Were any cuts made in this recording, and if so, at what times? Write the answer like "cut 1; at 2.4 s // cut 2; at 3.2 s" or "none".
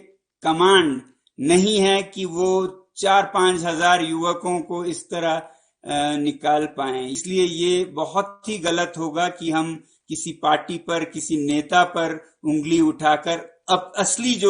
cut 1; at 7.1 s